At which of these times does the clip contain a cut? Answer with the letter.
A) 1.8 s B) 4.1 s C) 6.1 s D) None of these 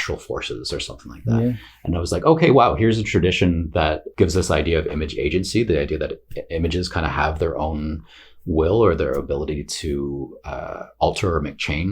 B